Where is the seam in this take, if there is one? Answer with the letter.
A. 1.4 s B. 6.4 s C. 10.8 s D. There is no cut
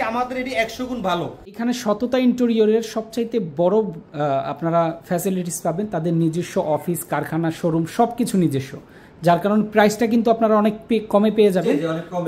A